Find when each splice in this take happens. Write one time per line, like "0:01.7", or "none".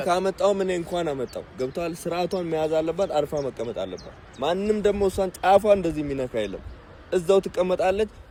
none